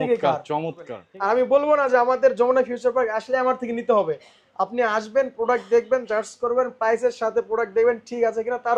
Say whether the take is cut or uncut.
cut